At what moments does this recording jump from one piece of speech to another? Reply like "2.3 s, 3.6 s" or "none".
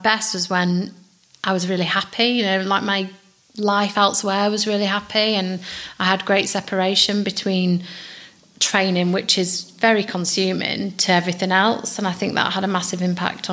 none